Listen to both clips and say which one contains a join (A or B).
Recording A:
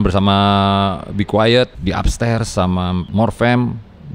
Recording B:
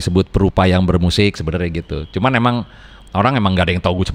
A